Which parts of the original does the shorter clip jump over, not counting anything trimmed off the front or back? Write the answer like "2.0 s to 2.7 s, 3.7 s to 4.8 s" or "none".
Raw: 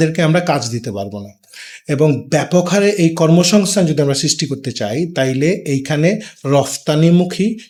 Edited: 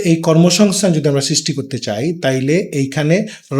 none